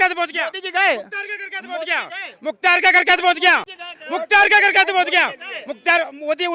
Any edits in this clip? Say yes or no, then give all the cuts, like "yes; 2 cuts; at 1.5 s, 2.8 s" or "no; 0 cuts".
no; 0 cuts